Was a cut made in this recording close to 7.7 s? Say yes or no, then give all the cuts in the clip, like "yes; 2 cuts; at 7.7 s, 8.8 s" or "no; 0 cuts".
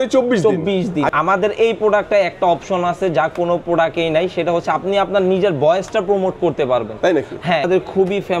yes; 2 cuts; at 1.1 s, 7.7 s